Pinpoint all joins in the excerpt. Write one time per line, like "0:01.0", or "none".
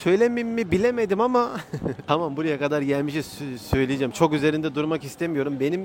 none